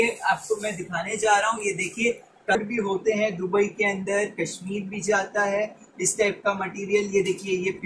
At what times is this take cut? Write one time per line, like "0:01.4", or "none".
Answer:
0:02.6